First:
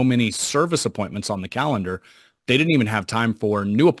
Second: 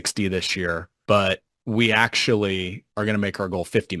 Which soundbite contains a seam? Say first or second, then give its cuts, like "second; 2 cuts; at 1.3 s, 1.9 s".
second; 3 cuts; at 0.9 s, 1.5 s, 2.8 s